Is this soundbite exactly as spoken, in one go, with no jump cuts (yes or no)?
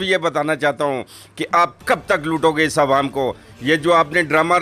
no